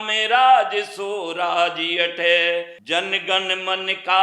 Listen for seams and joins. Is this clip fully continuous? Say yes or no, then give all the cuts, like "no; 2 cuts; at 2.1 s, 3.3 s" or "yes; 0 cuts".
no; 1 cut; at 2.8 s